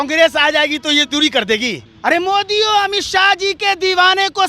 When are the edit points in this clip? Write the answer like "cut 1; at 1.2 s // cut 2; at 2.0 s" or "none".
cut 1; at 1.9 s